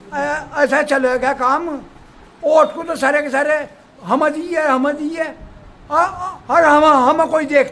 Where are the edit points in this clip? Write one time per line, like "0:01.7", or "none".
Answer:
none